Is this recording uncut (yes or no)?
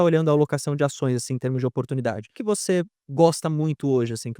no